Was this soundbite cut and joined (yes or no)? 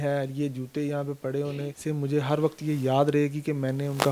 yes